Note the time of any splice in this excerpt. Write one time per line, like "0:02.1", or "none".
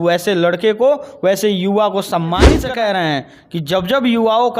0:02.6